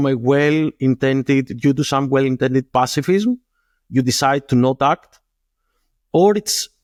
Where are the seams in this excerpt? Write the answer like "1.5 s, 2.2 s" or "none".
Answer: none

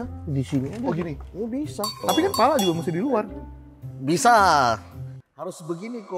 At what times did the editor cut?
2.0 s

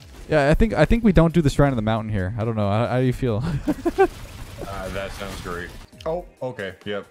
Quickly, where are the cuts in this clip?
5.8 s

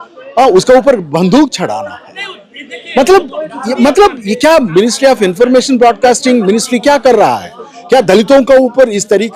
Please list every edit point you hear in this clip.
none

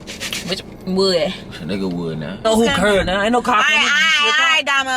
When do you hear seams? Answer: 2.4 s

